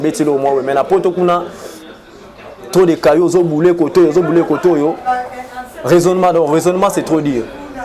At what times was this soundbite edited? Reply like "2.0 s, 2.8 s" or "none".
none